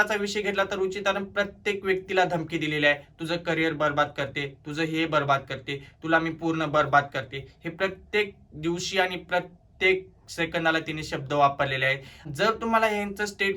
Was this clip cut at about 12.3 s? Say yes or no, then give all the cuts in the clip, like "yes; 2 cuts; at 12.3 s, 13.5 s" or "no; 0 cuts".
yes; 1 cut; at 12.3 s